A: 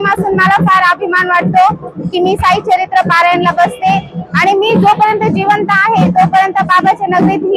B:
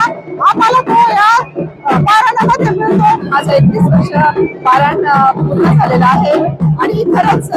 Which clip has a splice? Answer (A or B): B